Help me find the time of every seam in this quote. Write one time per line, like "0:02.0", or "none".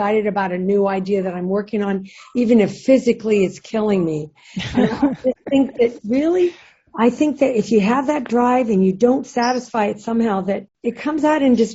none